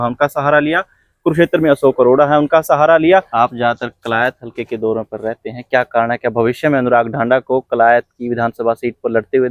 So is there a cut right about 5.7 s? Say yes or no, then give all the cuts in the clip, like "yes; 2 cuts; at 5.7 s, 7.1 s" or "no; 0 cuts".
no; 1 cut; at 3.3 s